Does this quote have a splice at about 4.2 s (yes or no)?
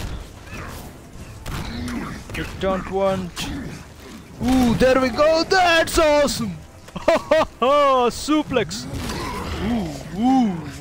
no